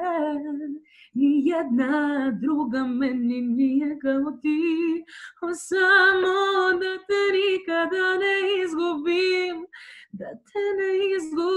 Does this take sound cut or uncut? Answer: uncut